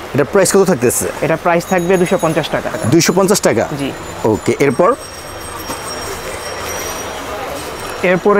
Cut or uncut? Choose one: uncut